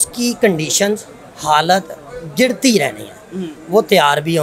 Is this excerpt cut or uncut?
uncut